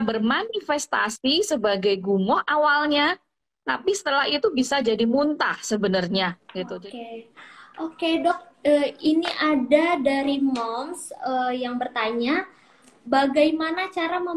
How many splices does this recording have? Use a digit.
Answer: 1